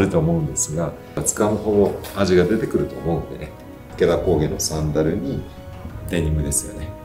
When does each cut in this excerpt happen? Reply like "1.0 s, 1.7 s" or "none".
1.2 s, 3.8 s